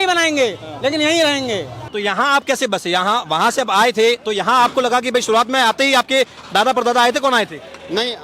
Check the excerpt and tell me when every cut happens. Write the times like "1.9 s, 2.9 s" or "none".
1.8 s